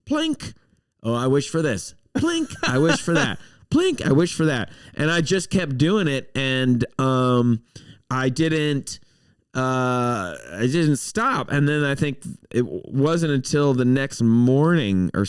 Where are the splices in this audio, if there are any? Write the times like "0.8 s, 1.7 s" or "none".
none